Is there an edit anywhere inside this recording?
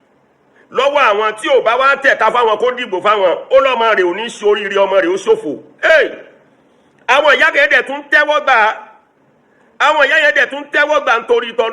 no; 0 cuts

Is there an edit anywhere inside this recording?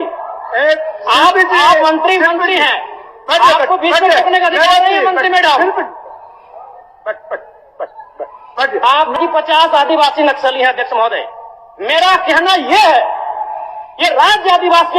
yes; 1 cut; at 9.2 s

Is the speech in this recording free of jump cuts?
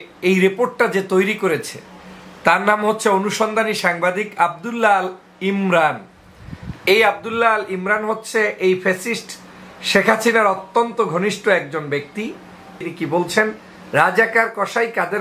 no; 1 cut; at 12.8 s

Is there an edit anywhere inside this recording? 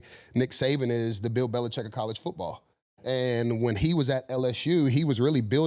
no; 0 cuts

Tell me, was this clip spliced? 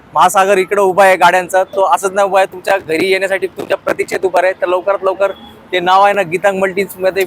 no; 0 cuts

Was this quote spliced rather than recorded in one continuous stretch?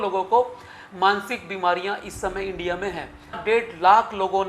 yes; 1 cut; at 3.4 s

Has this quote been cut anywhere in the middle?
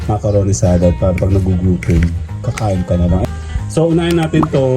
yes; 1 cut; at 3.2 s

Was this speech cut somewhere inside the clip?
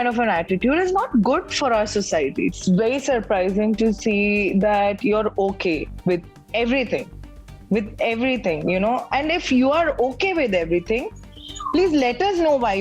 yes; 1 cut; at 2.6 s

